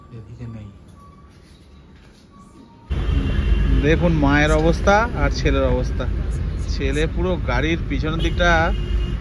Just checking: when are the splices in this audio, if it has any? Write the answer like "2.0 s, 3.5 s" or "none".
2.9 s